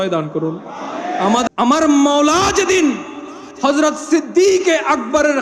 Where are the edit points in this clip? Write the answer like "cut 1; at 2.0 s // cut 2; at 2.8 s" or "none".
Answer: cut 1; at 1.5 s